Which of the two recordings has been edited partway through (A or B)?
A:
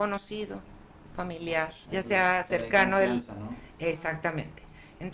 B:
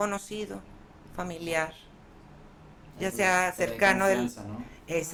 A